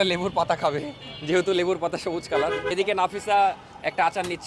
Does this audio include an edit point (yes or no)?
no